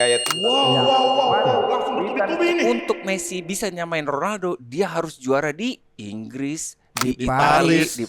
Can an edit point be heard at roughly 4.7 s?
no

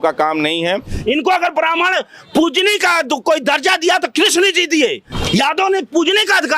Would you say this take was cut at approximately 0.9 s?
yes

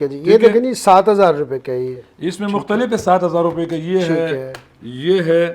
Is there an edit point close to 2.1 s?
no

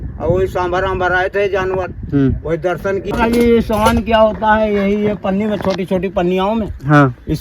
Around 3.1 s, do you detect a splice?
yes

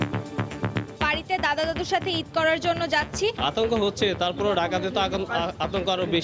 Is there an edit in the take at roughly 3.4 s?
yes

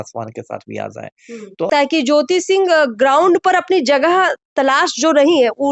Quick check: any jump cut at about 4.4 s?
no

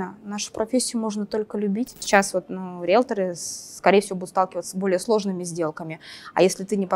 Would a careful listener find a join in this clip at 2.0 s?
yes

